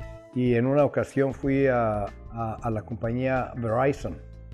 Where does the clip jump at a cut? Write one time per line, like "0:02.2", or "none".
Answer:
0:02.2